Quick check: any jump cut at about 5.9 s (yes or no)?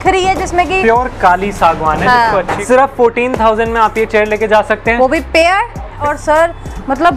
yes